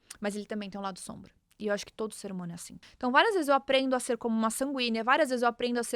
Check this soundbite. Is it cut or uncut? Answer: cut